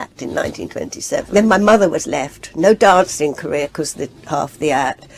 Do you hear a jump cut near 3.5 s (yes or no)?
no